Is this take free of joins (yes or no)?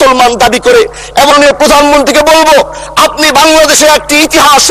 no